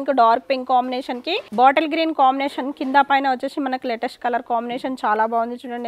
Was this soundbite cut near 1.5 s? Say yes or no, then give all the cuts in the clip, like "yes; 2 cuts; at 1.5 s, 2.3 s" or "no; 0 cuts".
no; 0 cuts